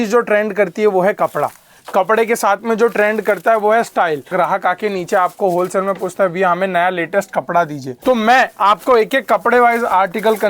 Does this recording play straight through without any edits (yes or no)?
no